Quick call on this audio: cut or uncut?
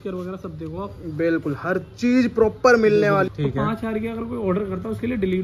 cut